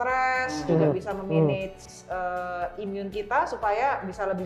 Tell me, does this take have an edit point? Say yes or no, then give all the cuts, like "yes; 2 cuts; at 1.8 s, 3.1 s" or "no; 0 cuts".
yes; 1 cut; at 1.9 s